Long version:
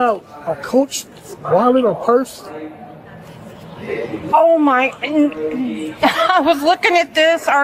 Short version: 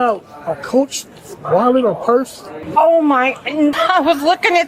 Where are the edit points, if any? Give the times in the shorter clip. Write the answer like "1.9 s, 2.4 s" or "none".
2.6 s, 3.8 s